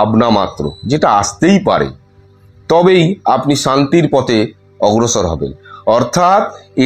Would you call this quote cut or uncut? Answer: uncut